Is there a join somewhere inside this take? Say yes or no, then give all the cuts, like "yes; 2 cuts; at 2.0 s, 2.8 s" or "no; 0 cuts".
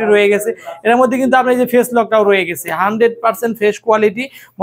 no; 0 cuts